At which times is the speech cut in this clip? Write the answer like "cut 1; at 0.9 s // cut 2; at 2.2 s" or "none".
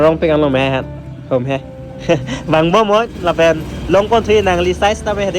none